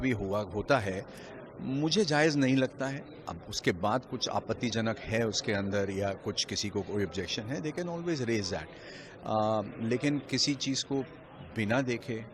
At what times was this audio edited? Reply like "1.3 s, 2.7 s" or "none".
none